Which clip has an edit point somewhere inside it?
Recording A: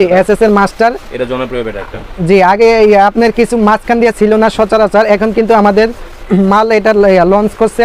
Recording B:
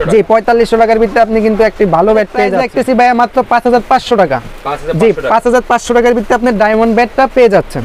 B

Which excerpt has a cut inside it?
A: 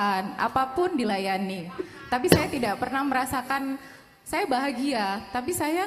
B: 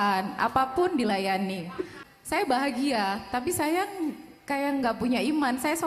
B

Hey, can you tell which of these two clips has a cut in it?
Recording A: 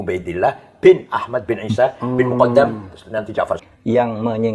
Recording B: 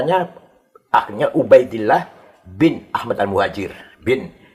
A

